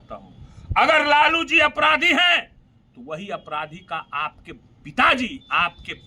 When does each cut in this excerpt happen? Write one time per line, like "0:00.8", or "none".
none